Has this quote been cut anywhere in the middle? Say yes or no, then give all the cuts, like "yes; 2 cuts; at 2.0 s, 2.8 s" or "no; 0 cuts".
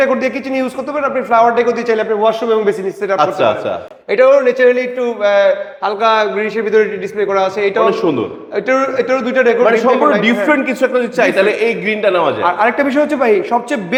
no; 0 cuts